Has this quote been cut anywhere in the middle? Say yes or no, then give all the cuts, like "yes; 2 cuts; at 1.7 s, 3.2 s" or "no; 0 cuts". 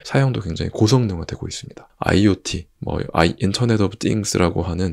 no; 0 cuts